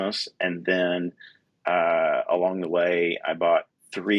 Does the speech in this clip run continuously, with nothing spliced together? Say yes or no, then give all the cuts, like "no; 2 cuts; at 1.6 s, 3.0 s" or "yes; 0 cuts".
yes; 0 cuts